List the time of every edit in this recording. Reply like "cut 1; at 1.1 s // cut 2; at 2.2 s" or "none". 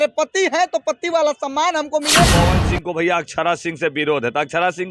cut 1; at 2.3 s